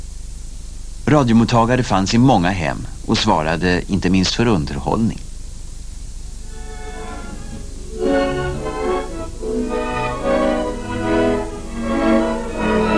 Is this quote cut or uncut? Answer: cut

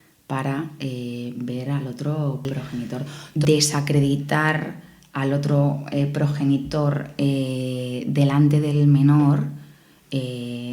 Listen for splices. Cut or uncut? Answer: cut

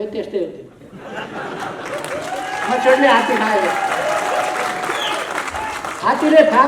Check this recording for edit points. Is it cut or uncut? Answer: uncut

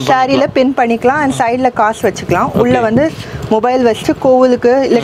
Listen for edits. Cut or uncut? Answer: uncut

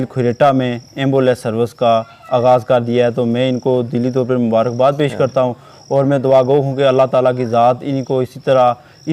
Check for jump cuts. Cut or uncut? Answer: uncut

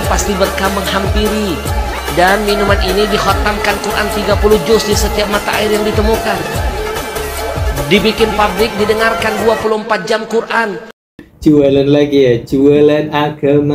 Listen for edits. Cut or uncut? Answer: uncut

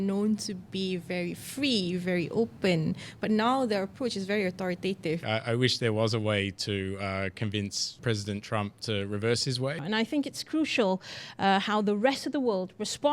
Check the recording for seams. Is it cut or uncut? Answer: cut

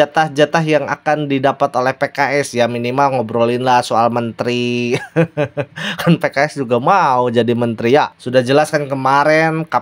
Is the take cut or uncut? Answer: cut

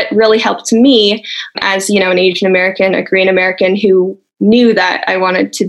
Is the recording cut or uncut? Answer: cut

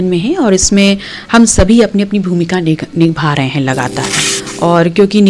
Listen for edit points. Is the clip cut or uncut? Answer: uncut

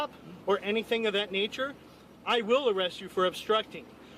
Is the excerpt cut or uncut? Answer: uncut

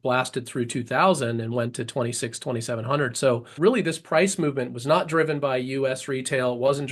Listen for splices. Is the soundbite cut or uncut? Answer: cut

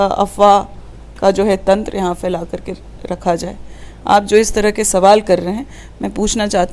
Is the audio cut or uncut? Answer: uncut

